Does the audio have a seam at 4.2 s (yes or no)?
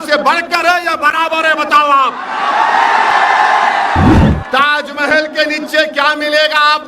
yes